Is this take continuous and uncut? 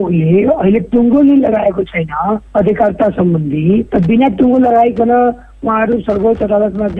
yes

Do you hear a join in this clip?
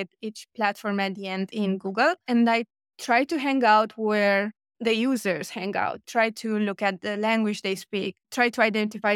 yes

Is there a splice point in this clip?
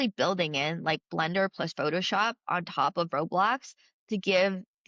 no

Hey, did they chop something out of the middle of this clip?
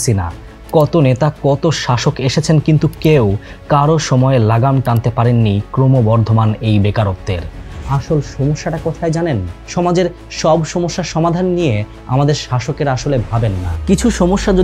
yes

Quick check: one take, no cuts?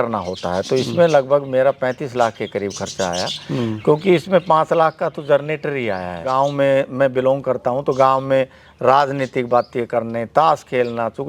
no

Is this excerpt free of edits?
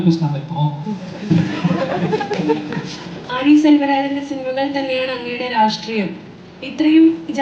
no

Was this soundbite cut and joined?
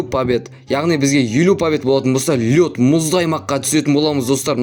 no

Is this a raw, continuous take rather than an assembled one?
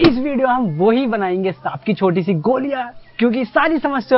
yes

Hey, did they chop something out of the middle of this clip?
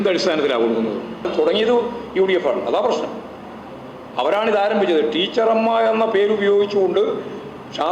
yes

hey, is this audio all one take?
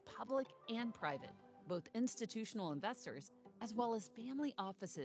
yes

